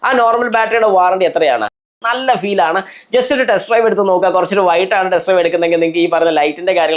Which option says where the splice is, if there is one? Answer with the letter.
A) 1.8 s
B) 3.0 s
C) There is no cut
A